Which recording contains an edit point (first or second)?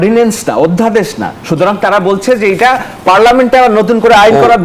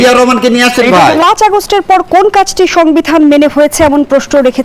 second